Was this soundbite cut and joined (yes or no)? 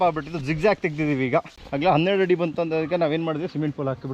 yes